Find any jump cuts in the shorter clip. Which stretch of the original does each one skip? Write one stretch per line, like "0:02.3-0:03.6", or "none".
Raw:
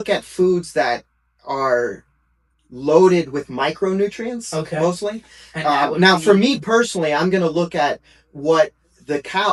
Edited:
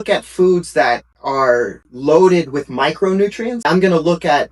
0:01.1-0:01.4
0:02.1-0:02.6
0:04.4-0:07.1